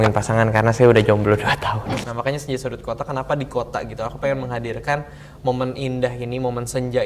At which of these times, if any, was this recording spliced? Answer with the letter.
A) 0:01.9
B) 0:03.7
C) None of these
A